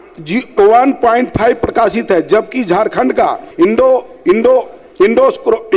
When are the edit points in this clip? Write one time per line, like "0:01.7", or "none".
0:03.4